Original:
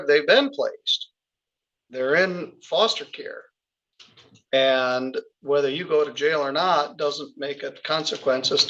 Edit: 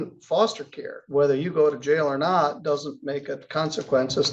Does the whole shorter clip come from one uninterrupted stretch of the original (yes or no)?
no